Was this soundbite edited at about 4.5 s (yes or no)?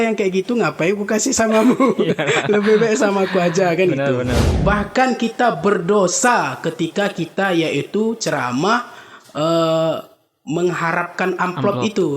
yes